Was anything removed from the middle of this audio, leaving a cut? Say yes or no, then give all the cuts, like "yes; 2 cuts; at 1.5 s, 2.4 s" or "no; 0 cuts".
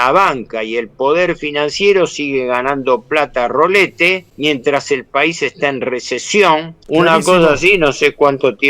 yes; 2 cuts; at 4.3 s, 6.7 s